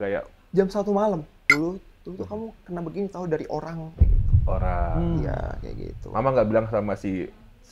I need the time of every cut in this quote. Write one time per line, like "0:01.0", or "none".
0:01.3

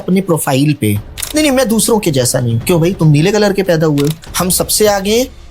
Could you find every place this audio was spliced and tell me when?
0:01.1
0:04.2

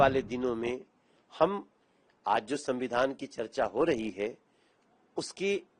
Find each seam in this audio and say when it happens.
none

